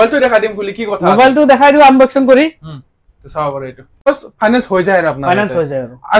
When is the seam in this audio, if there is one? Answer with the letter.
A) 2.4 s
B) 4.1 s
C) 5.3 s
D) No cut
B